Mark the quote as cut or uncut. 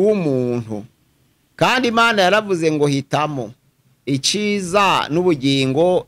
uncut